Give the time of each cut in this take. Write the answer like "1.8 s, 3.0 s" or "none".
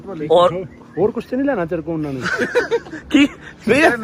none